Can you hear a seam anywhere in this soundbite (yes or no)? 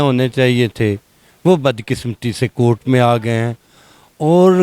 no